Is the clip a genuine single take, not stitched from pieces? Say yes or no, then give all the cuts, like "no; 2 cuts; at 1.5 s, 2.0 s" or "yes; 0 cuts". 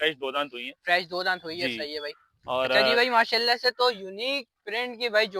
no; 1 cut; at 2.9 s